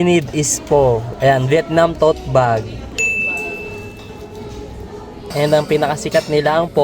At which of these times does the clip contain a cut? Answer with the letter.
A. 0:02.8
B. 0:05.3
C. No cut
B